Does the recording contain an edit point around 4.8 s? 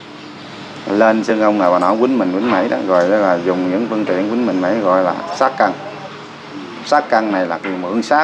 no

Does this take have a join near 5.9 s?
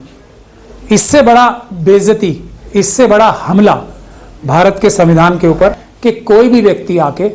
yes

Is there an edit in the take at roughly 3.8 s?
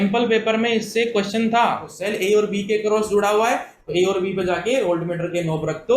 no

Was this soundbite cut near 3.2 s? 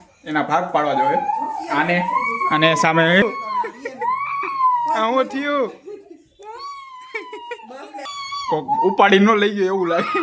yes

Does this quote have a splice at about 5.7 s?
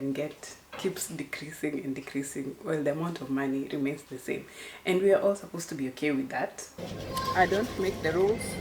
no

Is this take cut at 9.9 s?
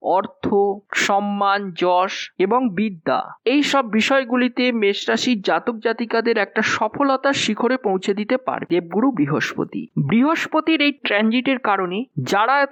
no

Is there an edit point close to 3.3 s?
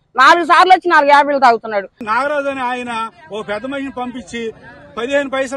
no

